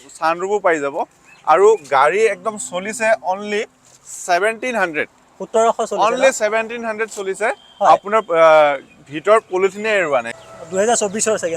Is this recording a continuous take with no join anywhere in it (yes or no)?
no